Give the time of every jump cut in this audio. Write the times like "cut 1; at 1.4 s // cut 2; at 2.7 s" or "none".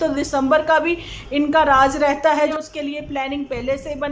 cut 1; at 2.5 s

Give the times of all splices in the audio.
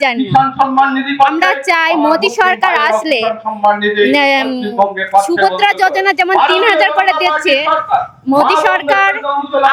none

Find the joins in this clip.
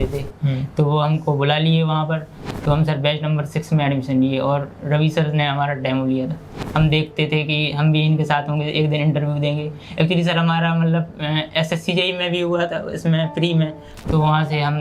cut 1; at 2.4 s // cut 2; at 6.5 s // cut 3; at 13.9 s

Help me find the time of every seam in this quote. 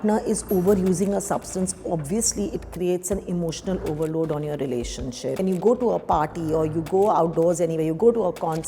cut 1; at 5.4 s

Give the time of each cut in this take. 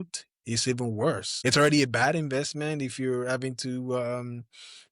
cut 1; at 1.3 s

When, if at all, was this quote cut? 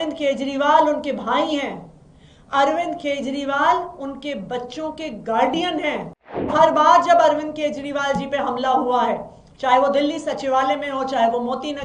cut 1; at 6.5 s

